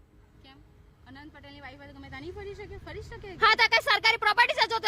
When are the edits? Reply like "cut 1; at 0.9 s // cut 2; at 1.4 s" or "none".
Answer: none